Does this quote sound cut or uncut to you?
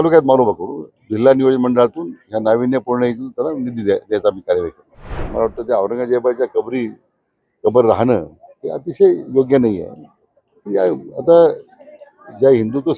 cut